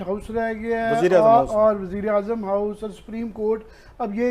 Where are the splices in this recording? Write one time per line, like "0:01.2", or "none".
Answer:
none

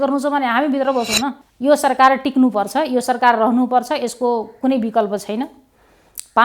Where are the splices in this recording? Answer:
0:01.4

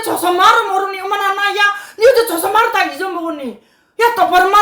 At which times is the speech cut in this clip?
none

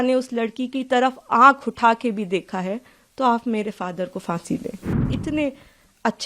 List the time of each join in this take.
0:05.1

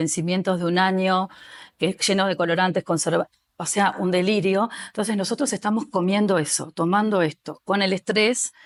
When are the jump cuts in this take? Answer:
none

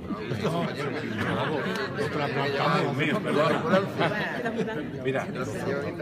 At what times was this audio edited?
0:04.9

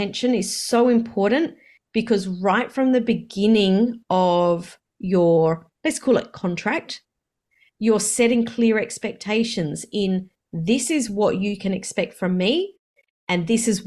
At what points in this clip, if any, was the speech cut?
none

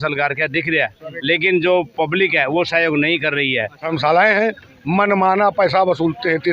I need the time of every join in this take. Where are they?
0:03.9

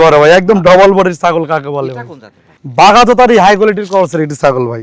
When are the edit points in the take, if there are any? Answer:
none

